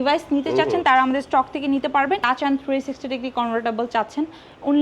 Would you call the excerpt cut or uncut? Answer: cut